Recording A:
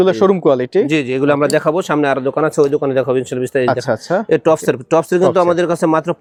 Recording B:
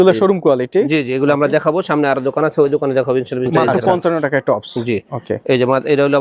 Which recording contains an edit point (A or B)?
B